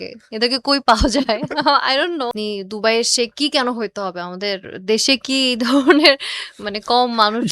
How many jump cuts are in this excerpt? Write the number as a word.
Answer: one